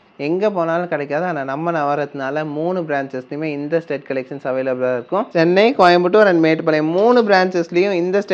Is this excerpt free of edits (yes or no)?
no